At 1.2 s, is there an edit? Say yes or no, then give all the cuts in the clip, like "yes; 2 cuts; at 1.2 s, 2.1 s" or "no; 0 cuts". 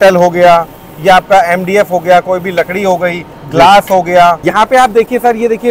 no; 1 cut; at 4.5 s